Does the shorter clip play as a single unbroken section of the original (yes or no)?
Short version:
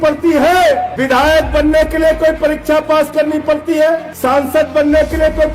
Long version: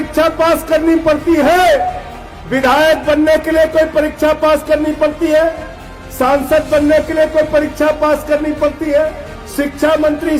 no